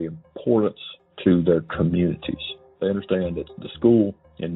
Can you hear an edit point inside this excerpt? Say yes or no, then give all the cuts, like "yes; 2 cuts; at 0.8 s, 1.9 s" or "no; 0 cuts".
no; 0 cuts